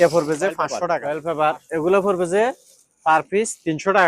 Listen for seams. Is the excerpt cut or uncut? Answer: cut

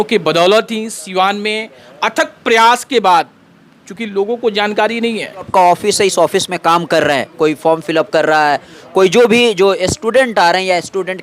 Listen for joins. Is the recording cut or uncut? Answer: cut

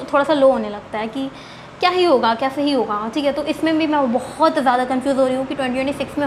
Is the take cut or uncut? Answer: uncut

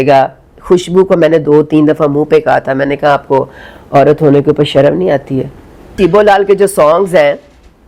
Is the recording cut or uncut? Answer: cut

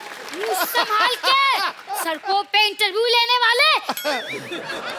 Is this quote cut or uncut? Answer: cut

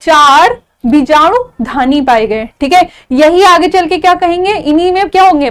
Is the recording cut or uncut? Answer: uncut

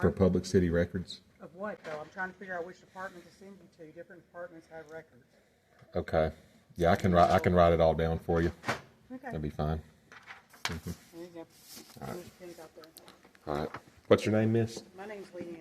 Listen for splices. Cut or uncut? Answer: uncut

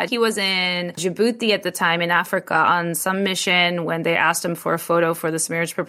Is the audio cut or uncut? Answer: cut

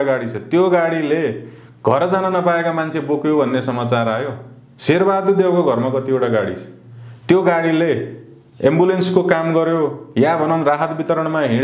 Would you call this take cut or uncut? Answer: uncut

